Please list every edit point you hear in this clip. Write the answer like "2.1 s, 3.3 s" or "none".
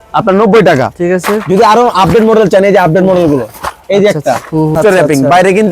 4.8 s

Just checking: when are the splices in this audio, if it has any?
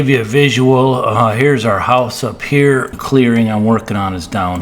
2.9 s

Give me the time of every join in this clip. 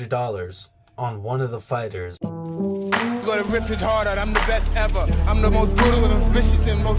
2.1 s

